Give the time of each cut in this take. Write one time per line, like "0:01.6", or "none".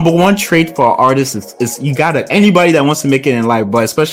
0:02.3